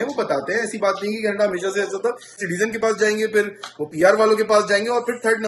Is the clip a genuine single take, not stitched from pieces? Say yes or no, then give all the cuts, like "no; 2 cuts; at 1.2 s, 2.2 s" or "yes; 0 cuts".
no; 1 cut; at 2.4 s